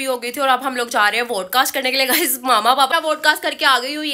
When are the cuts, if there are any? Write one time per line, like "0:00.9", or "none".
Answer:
0:02.9